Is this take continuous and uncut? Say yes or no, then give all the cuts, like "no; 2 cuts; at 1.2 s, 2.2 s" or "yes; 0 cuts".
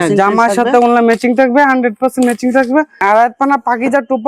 no; 1 cut; at 3.0 s